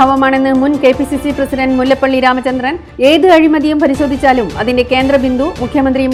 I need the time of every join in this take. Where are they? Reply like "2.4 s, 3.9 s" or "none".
none